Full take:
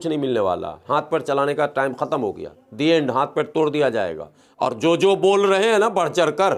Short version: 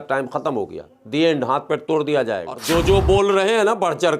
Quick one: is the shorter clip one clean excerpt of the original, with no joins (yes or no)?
no